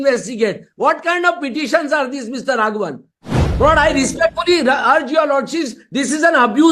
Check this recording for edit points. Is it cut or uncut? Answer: uncut